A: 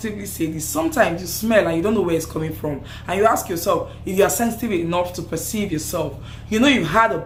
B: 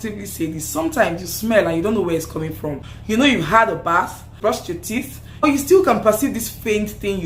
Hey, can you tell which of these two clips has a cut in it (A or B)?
B